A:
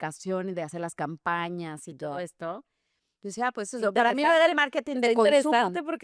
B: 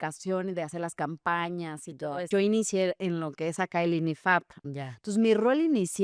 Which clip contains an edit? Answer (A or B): B